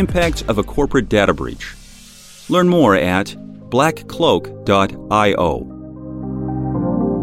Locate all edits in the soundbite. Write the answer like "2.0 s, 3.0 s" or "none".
6.1 s